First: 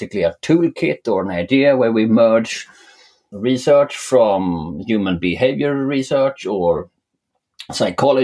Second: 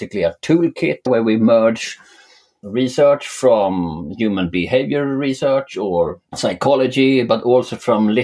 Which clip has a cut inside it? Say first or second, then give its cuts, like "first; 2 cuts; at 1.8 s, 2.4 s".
second; 2 cuts; at 1.1 s, 6.2 s